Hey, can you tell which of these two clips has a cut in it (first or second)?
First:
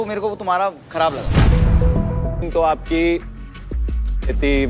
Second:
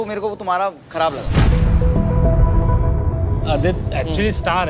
first